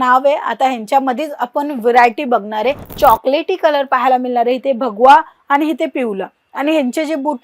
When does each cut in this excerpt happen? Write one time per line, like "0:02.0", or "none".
0:02.9